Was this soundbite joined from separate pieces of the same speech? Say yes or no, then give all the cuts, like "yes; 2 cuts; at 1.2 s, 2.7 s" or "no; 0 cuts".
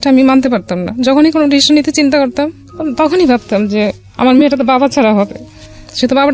no; 0 cuts